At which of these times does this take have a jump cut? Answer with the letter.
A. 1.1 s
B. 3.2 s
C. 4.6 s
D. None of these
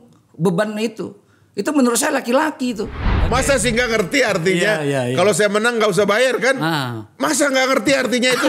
B